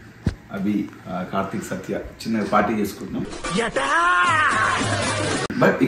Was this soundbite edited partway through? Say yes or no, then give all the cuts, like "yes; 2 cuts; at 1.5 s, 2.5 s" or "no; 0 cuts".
yes; 2 cuts; at 1.0 s, 3.3 s